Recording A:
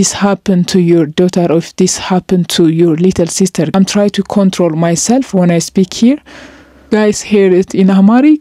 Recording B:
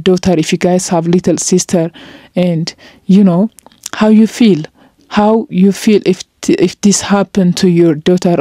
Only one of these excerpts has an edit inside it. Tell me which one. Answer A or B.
A